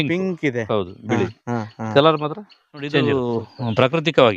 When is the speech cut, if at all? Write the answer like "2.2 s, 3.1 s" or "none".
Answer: 3.0 s